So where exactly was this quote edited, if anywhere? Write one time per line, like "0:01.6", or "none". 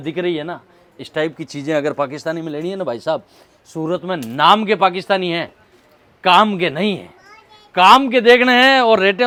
none